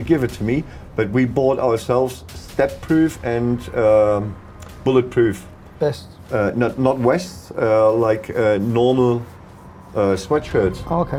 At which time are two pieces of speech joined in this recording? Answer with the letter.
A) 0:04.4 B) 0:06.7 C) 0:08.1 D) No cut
D